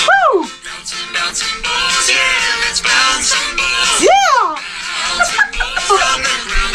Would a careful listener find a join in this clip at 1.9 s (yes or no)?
no